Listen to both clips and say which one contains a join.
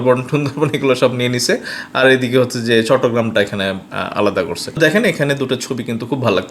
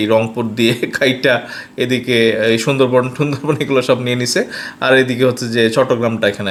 first; 1 cut; at 4.8 s

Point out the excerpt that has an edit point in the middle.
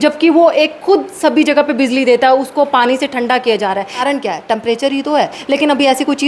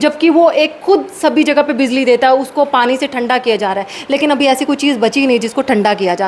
first; 2 cuts; at 4.0 s, 5.4 s

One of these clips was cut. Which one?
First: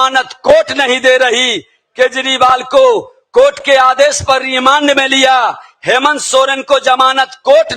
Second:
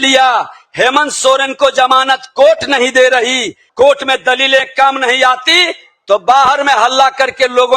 second; 1 cut; at 3.6 s

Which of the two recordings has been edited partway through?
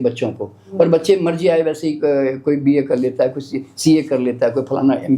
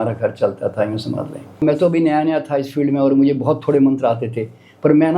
second; 1 cut; at 1.6 s

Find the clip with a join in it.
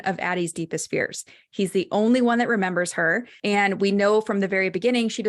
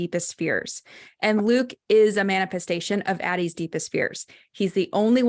first; 1 cut; at 3.3 s

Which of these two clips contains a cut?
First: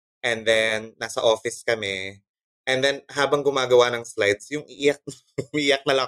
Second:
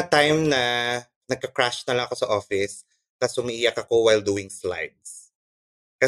second; 1 cut; at 1.2 s

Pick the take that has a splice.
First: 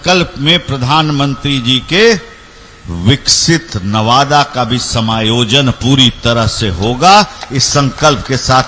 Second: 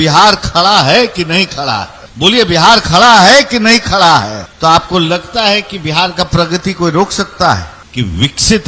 second; 3 cuts; at 2.0 s, 4.4 s, 7.8 s

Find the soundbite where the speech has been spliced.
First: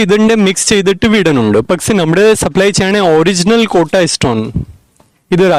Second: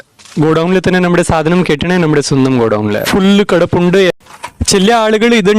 second; 2 cuts; at 3.0 s, 4.2 s

